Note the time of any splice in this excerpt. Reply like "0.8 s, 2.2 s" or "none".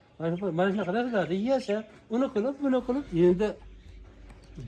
3.1 s